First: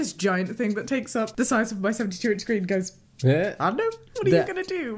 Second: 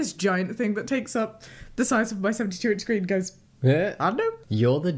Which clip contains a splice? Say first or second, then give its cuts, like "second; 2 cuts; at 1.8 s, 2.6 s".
first; 2 cuts; at 1.3 s, 4.0 s